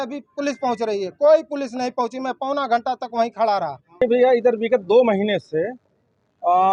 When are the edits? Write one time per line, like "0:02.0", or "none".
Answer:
none